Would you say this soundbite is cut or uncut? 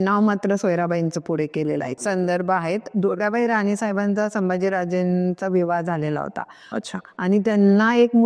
cut